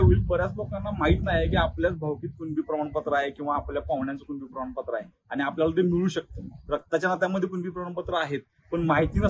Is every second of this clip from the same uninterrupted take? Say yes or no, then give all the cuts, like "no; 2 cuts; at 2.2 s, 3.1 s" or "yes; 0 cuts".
yes; 0 cuts